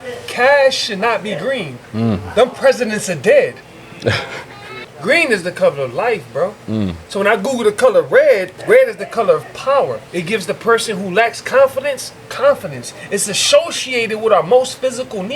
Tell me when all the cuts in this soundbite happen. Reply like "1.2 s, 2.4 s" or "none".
1.8 s, 4.9 s, 8.5 s, 10.1 s